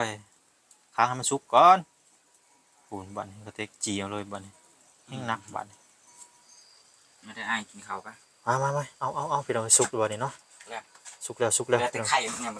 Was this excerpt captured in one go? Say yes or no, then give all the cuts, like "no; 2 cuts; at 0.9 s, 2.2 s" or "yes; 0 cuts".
no; 1 cut; at 6.5 s